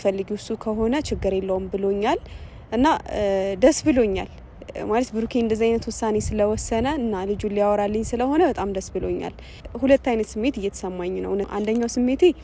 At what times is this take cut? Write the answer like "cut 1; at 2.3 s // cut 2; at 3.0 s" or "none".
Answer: cut 1; at 9.6 s // cut 2; at 11.5 s